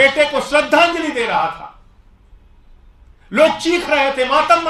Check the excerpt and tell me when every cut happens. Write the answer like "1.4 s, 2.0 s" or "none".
none